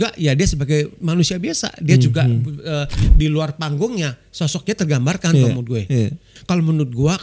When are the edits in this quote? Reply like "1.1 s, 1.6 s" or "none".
3.1 s, 6.3 s